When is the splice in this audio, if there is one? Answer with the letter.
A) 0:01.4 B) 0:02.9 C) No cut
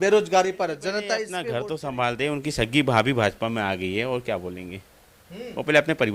A